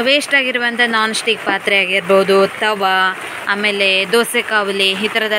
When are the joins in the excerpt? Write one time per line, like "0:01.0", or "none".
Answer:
none